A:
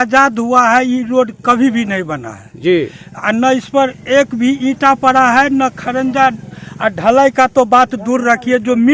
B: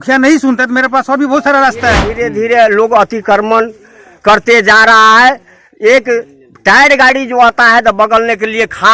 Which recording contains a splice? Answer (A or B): B